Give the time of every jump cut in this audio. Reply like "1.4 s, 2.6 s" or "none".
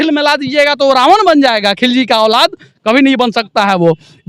none